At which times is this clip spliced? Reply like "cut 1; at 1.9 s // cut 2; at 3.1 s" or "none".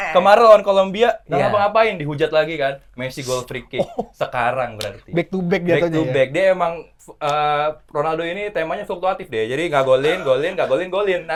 none